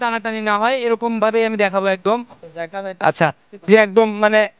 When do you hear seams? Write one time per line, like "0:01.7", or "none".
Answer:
0:03.7